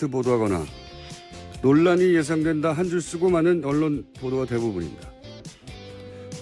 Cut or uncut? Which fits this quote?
cut